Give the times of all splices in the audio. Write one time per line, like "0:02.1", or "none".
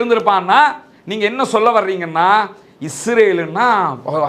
none